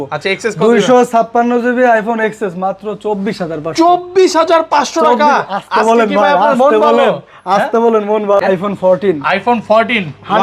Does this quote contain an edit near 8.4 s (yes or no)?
yes